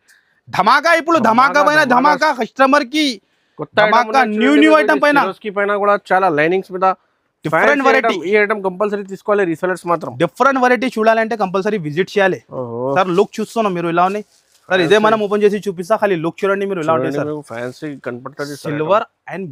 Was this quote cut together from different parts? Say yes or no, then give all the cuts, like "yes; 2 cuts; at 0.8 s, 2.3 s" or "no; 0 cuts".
no; 0 cuts